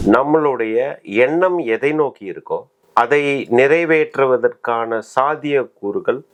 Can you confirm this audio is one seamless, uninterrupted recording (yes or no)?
yes